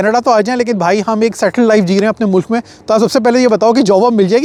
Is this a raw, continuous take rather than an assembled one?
yes; 0 cuts

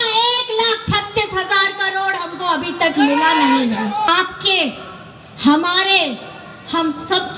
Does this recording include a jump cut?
yes; 1 cut; at 4.1 s

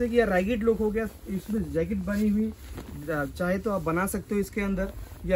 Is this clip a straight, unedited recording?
yes; 0 cuts

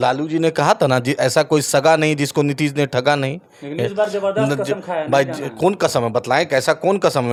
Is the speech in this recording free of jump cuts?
yes; 0 cuts

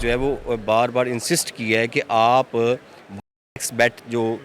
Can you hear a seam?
no; 0 cuts

